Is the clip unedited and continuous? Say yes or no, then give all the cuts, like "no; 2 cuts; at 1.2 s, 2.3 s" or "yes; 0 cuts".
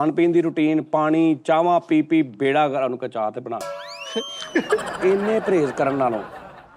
no; 1 cut; at 4.9 s